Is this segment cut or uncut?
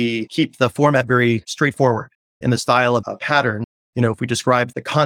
cut